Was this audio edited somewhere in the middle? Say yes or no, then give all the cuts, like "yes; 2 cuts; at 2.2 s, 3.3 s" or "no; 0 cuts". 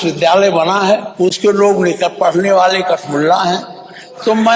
yes; 1 cut; at 1.1 s